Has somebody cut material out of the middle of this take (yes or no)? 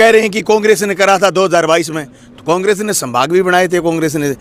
no